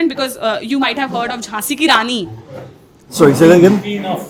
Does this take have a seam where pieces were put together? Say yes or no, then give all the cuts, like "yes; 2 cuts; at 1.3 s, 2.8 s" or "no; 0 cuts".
no; 0 cuts